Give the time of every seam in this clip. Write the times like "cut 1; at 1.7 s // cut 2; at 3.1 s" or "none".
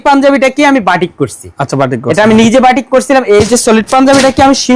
none